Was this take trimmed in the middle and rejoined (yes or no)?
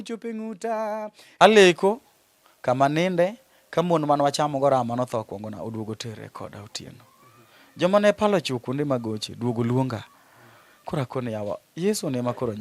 yes